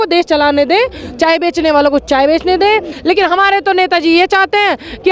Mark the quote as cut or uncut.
cut